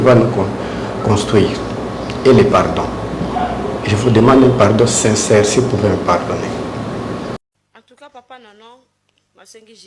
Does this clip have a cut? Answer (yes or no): yes